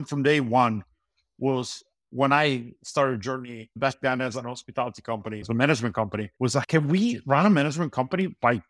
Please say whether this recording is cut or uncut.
cut